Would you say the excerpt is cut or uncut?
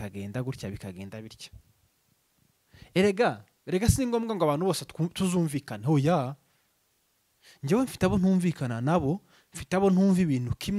uncut